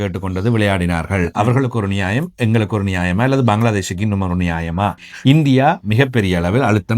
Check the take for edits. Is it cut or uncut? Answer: cut